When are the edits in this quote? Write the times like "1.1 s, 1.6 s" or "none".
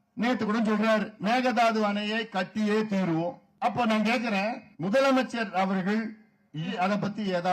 1.1 s, 3.4 s, 4.7 s, 6.7 s